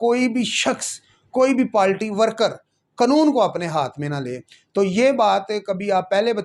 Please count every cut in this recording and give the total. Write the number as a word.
zero